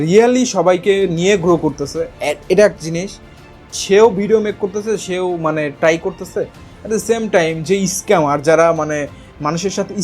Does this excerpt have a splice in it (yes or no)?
no